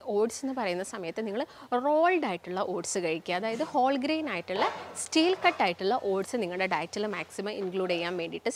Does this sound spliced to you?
no; 0 cuts

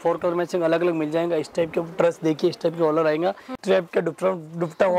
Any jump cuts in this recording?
yes; 1 cut; at 3.6 s

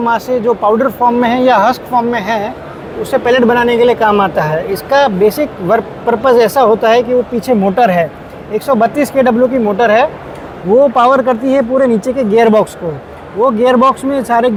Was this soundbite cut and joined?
no; 0 cuts

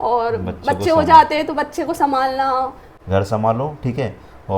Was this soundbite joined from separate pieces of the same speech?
yes; 1 cut; at 2.9 s

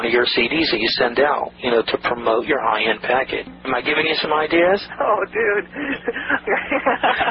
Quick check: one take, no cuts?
no; 2 cuts; at 3.5 s, 6.4 s

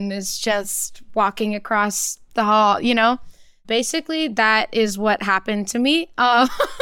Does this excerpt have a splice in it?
yes; 1 cut; at 3.6 s

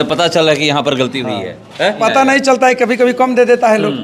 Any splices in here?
yes; 1 cut; at 2.0 s

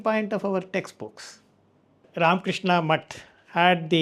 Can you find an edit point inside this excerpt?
yes; 1 cut; at 2.0 s

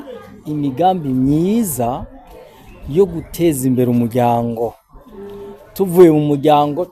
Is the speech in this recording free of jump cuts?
yes; 0 cuts

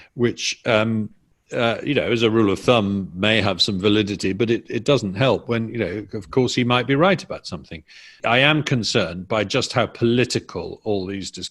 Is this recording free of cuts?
no; 1 cut; at 8.2 s

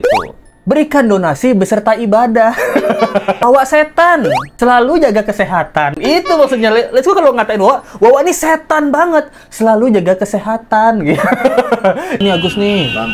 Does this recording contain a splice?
yes; 2 cuts; at 3.4 s, 12.2 s

